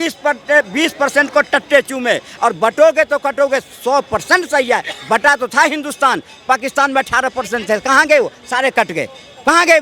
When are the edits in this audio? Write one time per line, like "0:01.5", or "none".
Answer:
0:02.3